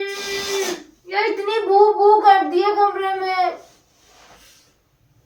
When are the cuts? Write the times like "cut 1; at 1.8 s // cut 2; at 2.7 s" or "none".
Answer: none